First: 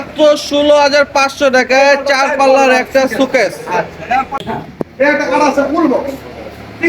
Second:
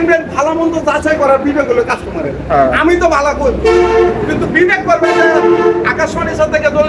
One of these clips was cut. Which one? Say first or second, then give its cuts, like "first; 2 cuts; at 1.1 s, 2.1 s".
first; 1 cut; at 4.4 s